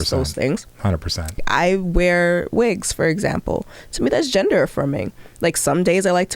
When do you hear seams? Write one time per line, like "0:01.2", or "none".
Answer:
0:01.4